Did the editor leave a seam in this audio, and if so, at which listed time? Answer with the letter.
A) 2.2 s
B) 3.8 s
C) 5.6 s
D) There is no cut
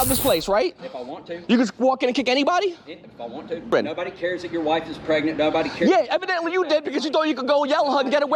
D